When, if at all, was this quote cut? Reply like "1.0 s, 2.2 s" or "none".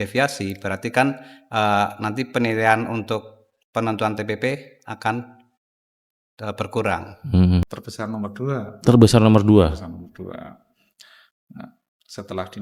7.7 s